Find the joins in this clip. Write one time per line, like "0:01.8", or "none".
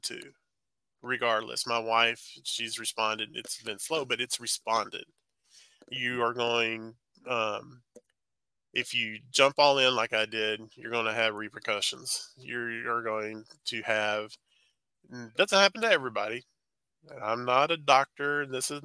none